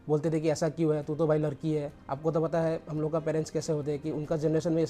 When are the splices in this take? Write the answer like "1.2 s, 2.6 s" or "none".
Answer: 2.0 s